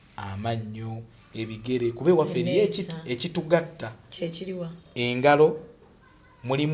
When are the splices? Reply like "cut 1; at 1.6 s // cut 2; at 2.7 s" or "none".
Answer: none